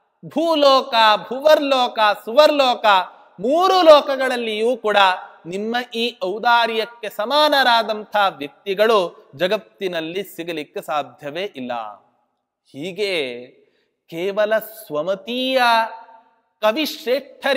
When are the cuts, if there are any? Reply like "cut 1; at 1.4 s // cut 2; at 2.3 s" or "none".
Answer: none